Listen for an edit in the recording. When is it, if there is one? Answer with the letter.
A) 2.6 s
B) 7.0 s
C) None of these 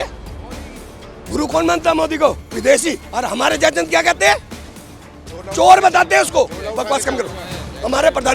C